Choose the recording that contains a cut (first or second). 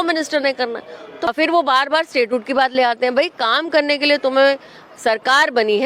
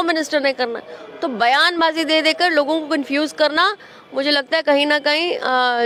first